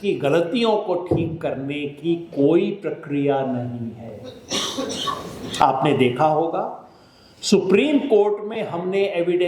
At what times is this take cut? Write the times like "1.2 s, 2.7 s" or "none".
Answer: none